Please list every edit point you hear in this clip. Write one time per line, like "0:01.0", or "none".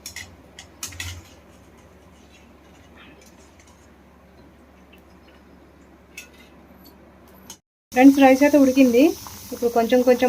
0:07.6